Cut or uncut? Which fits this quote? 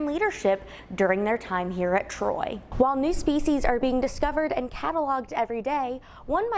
cut